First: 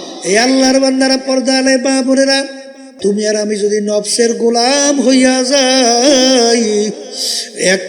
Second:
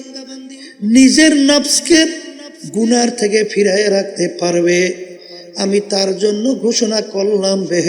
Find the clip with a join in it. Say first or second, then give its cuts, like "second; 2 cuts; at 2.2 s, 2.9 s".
first; 1 cut; at 2.9 s